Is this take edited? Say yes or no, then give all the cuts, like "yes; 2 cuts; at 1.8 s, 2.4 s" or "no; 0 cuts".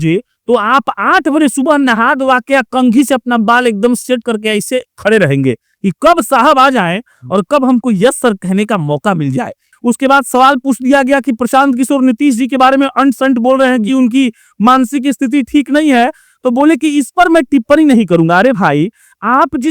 yes; 1 cut; at 9.6 s